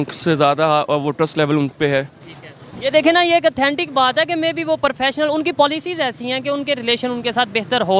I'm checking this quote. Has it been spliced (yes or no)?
no